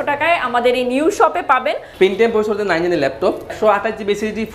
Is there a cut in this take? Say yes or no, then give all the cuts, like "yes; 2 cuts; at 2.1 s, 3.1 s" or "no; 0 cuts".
yes; 2 cuts; at 1.8 s, 3.5 s